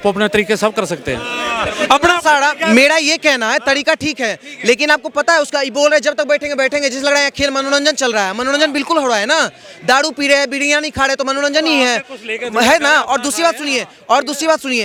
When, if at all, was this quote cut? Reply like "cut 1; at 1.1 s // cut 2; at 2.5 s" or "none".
none